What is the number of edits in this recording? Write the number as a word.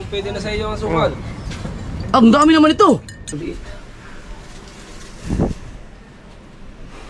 one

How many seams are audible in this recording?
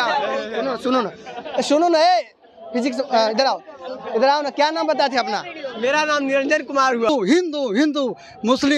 one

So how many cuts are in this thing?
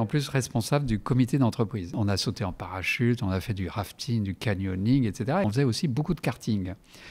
two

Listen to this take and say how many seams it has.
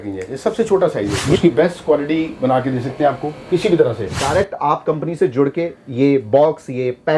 two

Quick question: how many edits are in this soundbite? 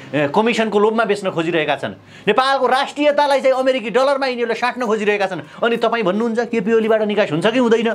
zero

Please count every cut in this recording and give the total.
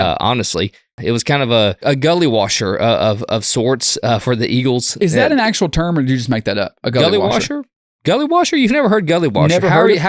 two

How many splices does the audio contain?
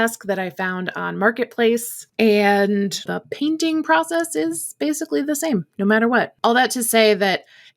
three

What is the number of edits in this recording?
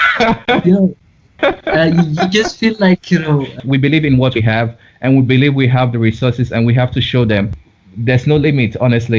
two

